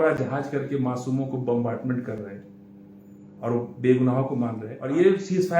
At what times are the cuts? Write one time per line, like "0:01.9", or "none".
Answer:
0:04.7